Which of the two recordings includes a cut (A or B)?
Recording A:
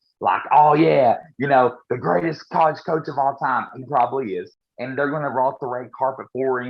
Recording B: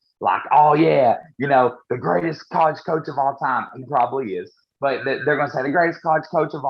A